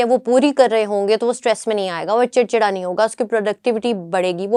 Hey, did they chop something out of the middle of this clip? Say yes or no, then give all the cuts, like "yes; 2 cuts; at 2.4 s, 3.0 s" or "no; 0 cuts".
no; 0 cuts